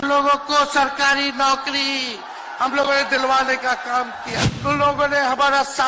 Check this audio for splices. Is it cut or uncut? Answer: cut